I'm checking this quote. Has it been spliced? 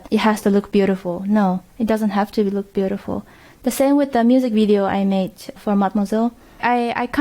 no; 0 cuts

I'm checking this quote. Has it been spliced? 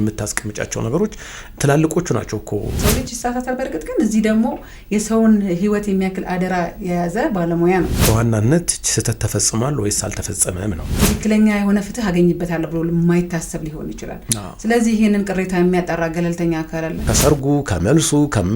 yes; 4 cuts; at 2.8 s, 8.0 s, 10.9 s, 17.1 s

